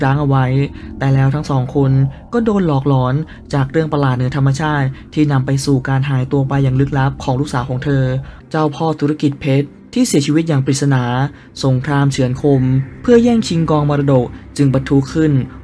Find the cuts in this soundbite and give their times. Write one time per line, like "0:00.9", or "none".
0:08.4